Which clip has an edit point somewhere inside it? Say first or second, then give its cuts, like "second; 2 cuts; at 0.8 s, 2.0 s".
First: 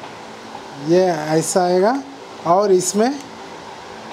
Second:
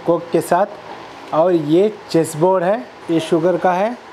second; 1 cut; at 2.9 s